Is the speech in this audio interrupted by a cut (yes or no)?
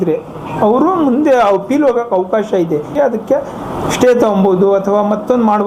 yes